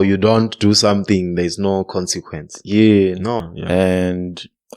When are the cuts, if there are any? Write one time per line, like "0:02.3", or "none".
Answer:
0:03.4